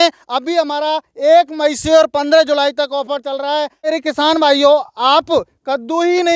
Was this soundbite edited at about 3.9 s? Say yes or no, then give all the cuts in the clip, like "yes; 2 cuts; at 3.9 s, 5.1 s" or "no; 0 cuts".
yes; 1 cut; at 3.9 s